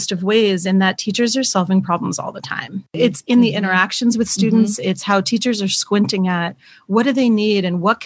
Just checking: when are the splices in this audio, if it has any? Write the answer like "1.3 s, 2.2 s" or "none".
3.0 s